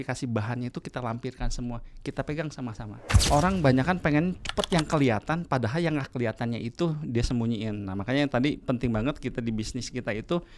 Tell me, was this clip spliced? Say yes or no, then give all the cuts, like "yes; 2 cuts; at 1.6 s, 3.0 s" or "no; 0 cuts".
yes; 1 cut; at 3.2 s